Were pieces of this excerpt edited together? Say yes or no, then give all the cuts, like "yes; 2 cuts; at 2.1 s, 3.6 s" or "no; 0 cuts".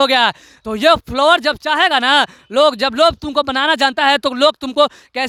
no; 0 cuts